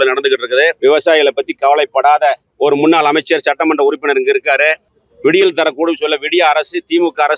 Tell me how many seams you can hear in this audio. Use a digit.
2